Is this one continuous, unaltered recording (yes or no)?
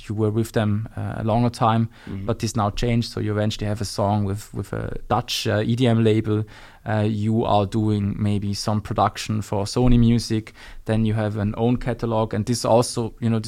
yes